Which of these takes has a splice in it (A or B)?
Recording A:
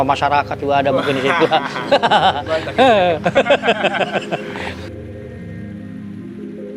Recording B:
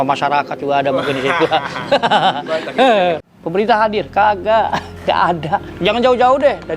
B